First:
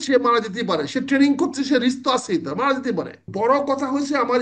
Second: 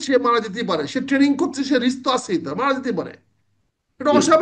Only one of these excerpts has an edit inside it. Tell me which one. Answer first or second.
first